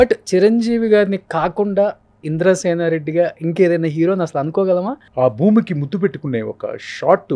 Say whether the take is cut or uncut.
cut